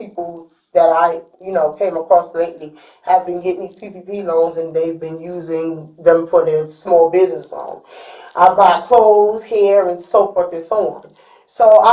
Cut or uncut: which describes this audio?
uncut